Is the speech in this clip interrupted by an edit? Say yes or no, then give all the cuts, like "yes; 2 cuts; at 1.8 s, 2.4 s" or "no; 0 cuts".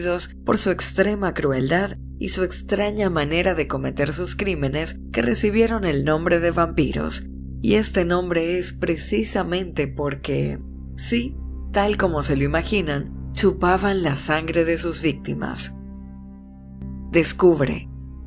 no; 0 cuts